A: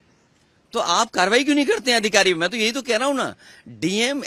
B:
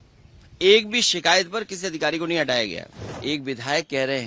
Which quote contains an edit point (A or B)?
B